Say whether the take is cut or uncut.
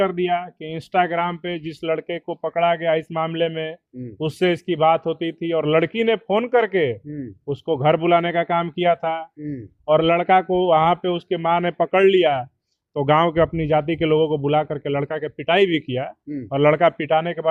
uncut